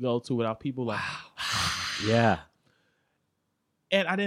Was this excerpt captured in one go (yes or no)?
yes